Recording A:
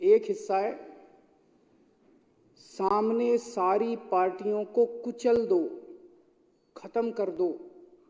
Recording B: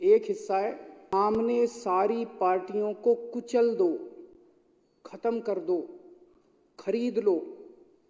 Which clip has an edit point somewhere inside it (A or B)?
B